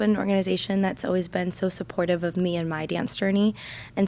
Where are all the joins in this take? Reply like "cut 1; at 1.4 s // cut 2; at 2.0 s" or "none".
none